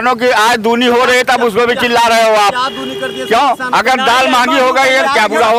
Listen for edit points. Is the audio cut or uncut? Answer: uncut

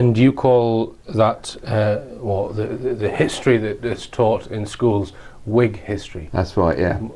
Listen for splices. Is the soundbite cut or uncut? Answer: cut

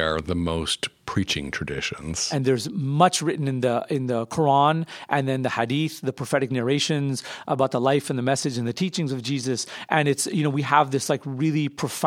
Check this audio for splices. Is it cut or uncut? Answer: cut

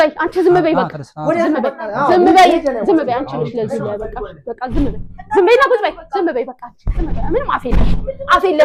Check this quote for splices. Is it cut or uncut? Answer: uncut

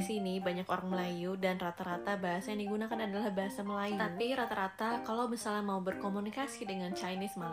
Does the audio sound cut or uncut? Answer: uncut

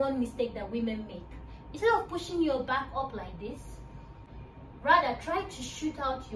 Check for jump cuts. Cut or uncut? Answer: cut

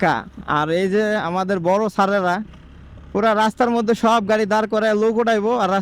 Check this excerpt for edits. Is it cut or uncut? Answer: uncut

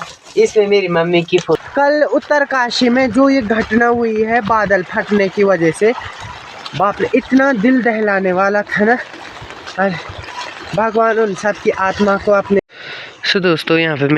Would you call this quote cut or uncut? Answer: cut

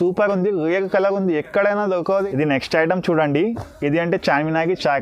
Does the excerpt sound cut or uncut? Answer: cut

